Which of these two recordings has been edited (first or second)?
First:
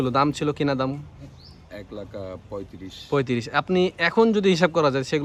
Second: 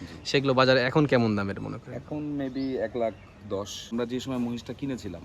second